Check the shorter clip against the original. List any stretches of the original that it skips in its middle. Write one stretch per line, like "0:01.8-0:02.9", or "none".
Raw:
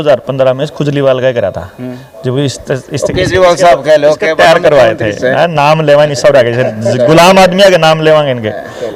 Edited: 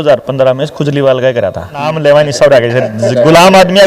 0:01.8-0:05.7